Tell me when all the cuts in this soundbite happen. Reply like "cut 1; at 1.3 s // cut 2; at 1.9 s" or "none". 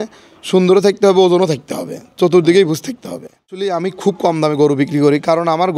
cut 1; at 3.6 s